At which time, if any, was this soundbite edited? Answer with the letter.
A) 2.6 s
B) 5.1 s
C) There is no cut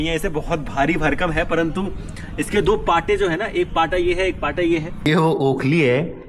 B